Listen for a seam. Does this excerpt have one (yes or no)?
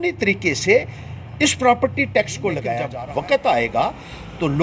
yes